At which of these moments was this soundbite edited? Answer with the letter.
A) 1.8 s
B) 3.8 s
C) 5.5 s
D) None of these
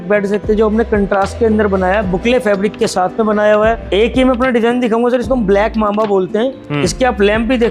B